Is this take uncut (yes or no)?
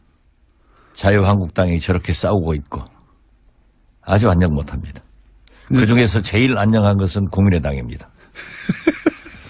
no